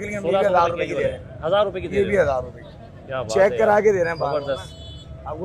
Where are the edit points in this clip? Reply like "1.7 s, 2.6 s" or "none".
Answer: none